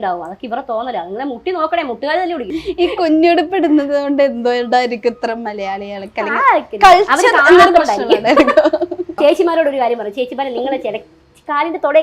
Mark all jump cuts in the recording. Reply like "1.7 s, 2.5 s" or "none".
2.5 s, 9.1 s